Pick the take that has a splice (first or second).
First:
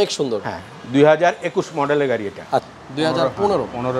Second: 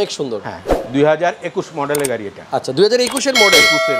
first